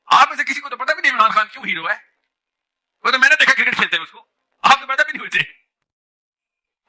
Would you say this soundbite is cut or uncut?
uncut